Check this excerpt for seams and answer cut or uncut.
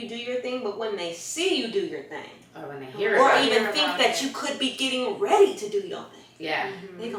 uncut